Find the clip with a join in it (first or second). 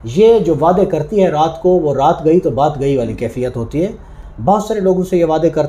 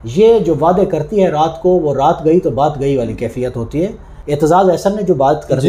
second